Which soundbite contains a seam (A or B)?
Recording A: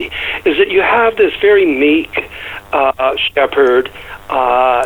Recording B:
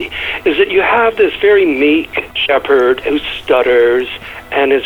B